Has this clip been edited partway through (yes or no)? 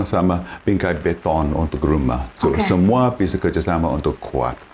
no